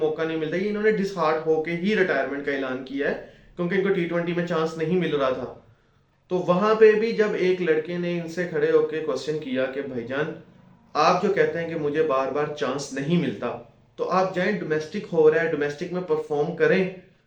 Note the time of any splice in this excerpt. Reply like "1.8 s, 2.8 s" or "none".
none